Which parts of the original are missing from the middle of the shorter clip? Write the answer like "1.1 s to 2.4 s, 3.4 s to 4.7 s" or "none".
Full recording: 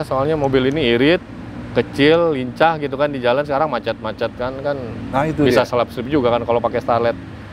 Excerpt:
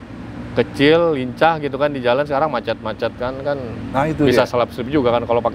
none